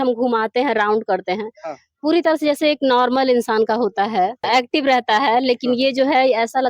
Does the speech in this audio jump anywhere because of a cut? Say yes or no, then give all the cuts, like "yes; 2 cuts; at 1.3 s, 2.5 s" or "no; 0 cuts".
yes; 1 cut; at 4.4 s